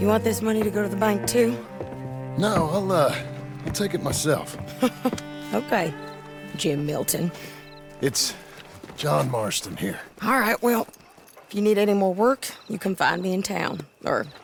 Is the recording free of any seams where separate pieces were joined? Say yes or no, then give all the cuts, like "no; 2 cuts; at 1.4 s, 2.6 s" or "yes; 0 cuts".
yes; 0 cuts